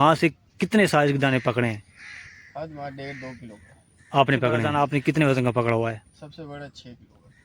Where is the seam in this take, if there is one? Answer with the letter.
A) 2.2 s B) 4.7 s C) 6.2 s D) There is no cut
B